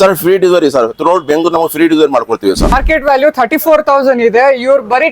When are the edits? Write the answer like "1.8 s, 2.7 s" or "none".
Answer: 2.8 s